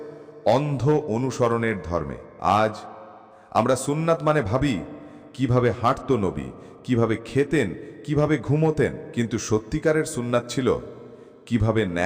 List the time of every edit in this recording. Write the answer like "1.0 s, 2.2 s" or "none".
2.2 s, 9.0 s